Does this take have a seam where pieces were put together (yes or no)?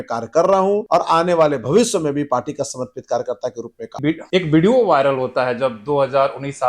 yes